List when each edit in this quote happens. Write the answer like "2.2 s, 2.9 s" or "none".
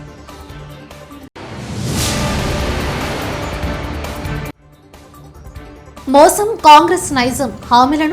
1.2 s